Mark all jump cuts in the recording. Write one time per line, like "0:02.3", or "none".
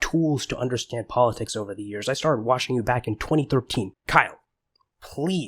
0:03.9